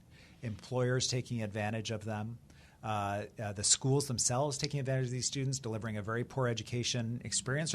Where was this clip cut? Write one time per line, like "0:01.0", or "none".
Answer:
none